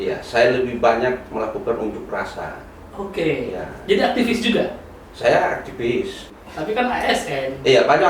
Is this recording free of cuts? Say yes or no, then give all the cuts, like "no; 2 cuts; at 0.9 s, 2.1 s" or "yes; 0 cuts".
no; 1 cut; at 6.4 s